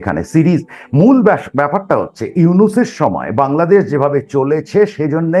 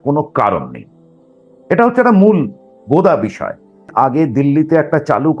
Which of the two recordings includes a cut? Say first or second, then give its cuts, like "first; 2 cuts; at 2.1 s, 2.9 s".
second; 1 cut; at 3.9 s